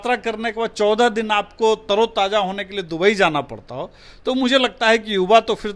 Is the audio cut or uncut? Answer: uncut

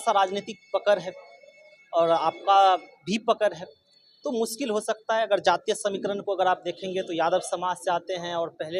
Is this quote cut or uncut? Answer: uncut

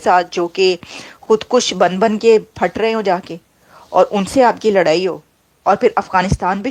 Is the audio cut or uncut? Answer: uncut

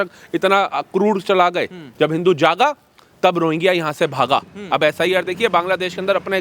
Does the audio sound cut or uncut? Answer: cut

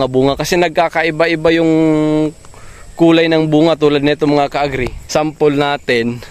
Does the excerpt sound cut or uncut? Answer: cut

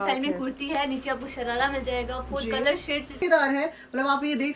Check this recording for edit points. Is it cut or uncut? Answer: cut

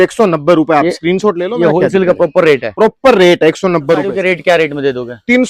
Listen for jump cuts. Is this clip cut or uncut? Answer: cut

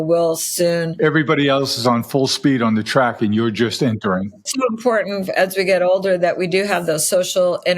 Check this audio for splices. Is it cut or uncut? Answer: cut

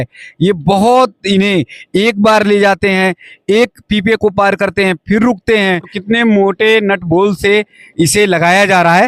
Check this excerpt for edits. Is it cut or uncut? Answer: cut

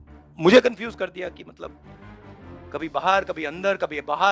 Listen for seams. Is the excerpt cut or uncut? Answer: uncut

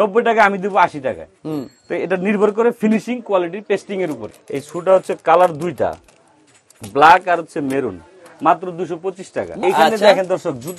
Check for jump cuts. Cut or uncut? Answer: cut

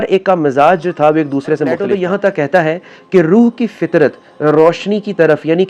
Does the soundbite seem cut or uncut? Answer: cut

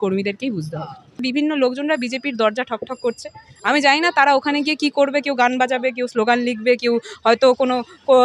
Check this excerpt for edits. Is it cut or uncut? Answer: cut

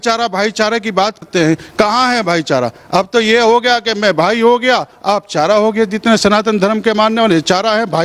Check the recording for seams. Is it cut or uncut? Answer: cut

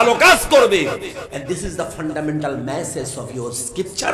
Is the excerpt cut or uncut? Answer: uncut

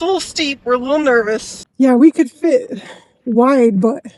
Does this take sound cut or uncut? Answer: cut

